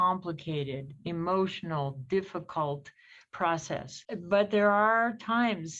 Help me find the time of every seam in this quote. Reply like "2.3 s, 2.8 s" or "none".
4.0 s